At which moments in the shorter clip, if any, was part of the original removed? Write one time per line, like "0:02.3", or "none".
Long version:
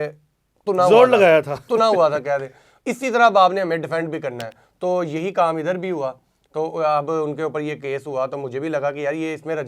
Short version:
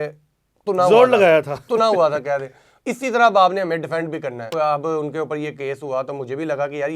0:04.5